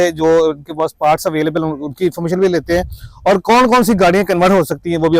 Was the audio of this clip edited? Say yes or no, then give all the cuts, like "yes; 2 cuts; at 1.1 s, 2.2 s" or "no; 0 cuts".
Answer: no; 0 cuts